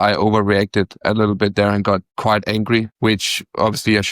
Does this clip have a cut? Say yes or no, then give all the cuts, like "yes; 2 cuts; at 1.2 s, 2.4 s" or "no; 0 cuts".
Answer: yes; 2 cuts; at 1.0 s, 2.4 s